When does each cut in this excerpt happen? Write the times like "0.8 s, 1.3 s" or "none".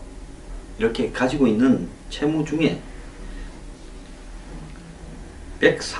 none